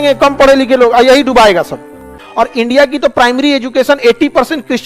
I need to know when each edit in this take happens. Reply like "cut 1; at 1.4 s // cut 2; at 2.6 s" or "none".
cut 1; at 2.2 s